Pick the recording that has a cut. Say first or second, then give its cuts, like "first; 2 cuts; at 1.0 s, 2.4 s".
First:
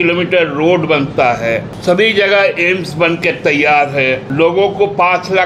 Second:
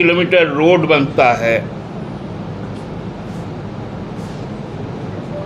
first; 2 cuts; at 1.7 s, 4.3 s